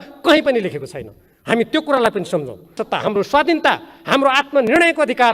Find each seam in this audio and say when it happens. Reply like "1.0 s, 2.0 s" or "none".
2.8 s